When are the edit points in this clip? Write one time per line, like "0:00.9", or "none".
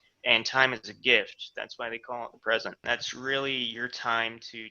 0:02.8